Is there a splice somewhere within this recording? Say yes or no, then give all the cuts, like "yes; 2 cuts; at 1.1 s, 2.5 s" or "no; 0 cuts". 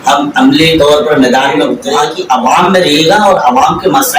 yes; 1 cut; at 1.8 s